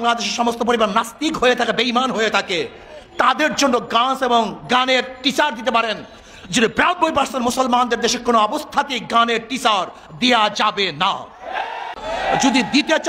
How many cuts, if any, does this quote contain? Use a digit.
1